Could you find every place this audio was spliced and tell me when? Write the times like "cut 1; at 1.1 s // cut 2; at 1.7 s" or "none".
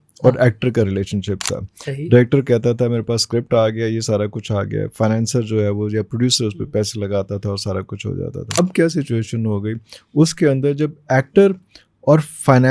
cut 1; at 8.6 s